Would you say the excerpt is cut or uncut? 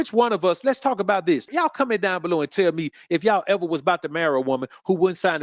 cut